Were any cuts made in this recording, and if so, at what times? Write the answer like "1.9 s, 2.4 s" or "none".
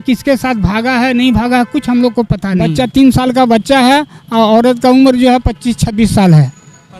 2.6 s